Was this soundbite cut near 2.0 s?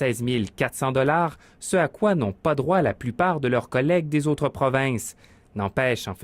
yes; 1 cut; at 2.0 s

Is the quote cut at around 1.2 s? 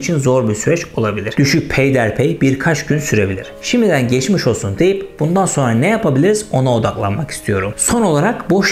yes; 2 cuts; at 1.2 s, 7.7 s

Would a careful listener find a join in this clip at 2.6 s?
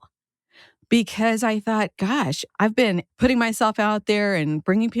yes; 1 cut; at 2.6 s

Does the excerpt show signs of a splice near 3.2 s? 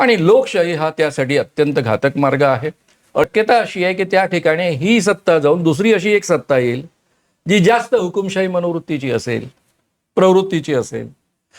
yes; 1 cut; at 3.2 s

